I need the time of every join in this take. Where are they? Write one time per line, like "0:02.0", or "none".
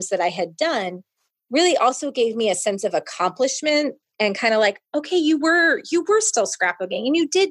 none